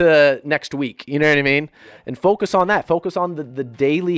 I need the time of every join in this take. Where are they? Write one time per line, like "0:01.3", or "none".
none